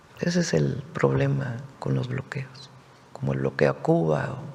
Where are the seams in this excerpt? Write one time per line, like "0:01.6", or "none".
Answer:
none